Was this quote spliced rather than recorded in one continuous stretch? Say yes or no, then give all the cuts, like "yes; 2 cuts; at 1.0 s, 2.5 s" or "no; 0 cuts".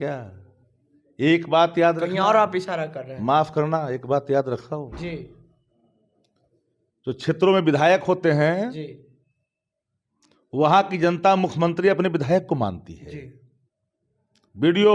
no; 0 cuts